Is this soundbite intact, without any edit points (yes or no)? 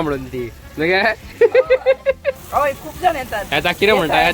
no